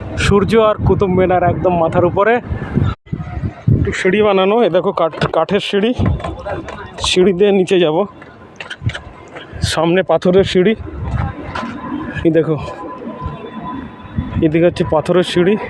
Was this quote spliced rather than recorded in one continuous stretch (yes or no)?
yes